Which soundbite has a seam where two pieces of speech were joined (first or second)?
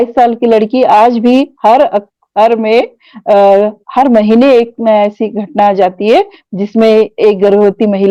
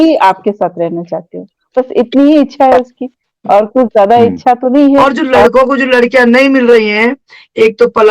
second